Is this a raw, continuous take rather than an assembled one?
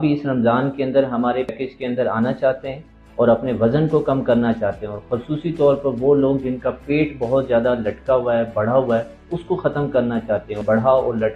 no; 2 cuts; at 1.5 s, 10.6 s

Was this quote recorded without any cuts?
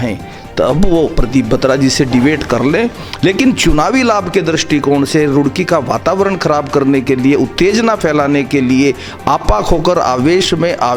yes; 0 cuts

